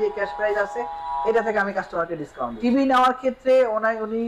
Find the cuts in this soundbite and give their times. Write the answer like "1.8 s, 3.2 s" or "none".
2.5 s